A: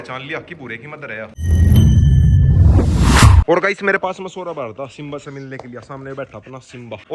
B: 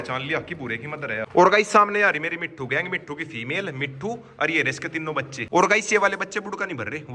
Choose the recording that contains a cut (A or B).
B